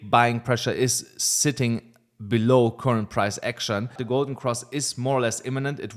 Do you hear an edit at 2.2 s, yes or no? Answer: no